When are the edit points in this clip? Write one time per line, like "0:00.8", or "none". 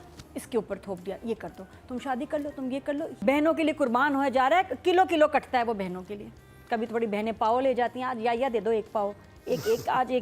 0:03.1